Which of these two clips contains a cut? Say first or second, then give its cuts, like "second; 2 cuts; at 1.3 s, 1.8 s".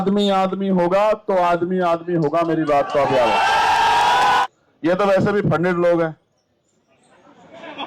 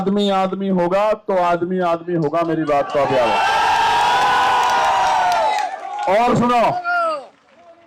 first; 1 cut; at 4.4 s